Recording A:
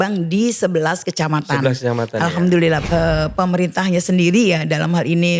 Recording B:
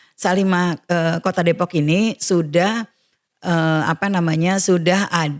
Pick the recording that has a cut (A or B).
A